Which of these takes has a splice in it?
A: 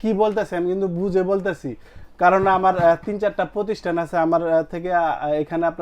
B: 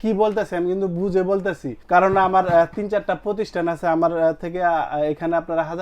B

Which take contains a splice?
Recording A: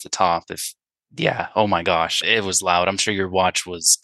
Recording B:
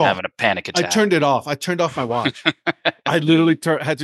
A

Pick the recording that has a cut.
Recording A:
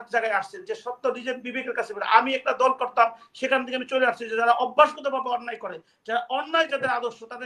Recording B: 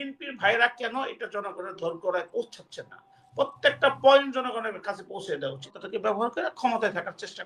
B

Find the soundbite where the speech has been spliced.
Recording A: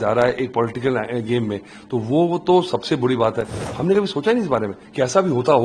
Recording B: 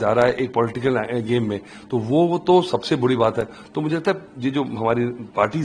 A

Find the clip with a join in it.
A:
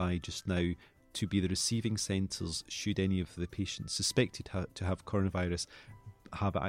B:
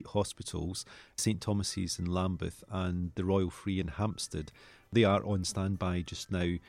B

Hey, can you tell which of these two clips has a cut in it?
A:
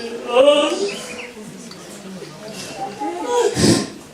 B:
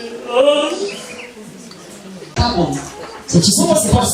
B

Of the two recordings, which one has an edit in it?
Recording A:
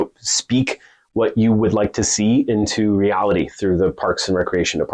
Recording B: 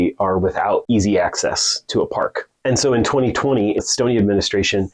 B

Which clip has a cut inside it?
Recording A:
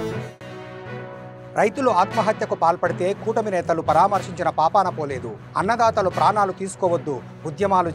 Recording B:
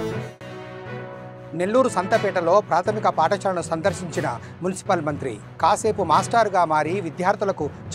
B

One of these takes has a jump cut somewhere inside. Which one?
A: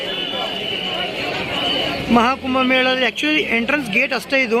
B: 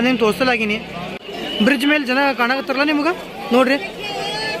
B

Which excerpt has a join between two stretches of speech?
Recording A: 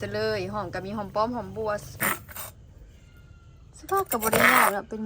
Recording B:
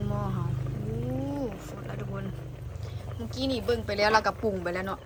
A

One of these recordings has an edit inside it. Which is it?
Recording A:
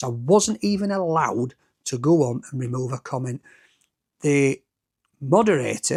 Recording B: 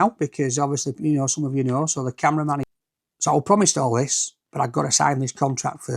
B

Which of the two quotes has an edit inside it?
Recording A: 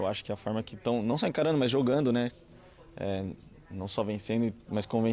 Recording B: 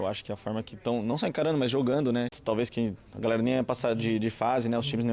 B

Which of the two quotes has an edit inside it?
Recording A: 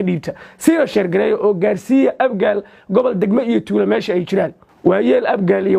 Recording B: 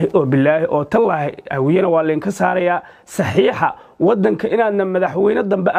A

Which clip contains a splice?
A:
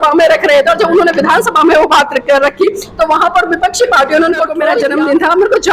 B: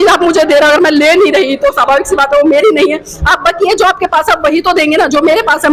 A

